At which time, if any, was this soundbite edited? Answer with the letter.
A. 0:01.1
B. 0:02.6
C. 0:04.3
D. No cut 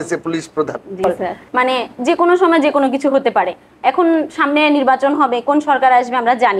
A